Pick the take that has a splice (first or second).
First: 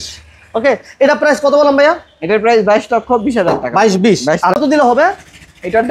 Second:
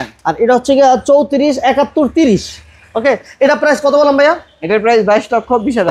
first